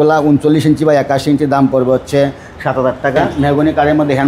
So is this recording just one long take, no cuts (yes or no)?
no